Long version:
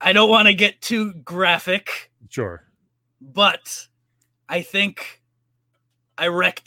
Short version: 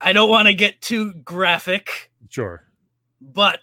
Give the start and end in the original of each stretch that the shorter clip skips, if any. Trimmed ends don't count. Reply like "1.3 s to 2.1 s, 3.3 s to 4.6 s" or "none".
none